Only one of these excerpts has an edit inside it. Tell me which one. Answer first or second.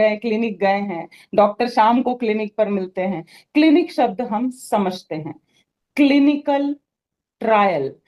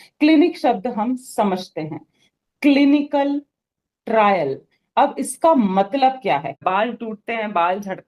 second